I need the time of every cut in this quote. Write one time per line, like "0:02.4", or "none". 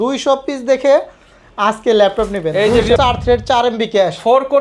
0:03.0